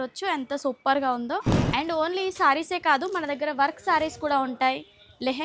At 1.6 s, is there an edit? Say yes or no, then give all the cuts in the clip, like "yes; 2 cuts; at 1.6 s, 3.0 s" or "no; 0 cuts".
yes; 1 cut; at 1.6 s